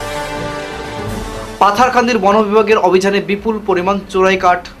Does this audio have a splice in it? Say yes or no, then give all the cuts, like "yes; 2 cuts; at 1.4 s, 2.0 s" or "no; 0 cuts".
yes; 1 cut; at 0.9 s